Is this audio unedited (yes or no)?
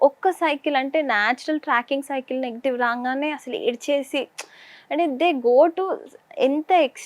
yes